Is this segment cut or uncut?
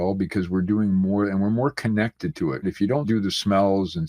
cut